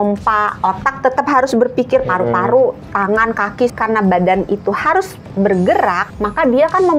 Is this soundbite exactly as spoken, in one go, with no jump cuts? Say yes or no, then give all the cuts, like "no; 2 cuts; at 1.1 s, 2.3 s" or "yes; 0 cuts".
no; 2 cuts; at 3.7 s, 6.0 s